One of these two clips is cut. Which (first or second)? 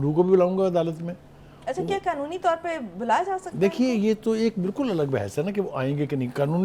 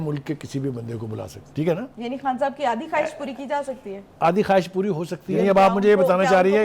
second